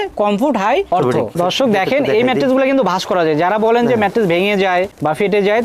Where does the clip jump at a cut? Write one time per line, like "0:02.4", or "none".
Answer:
0:01.4